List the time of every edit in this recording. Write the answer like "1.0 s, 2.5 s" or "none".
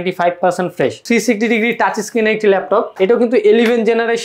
1.0 s, 2.9 s